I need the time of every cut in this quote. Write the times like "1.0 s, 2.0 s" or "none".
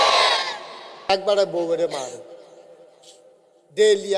1.1 s